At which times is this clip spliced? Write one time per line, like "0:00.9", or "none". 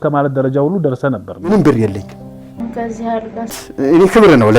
0:01.5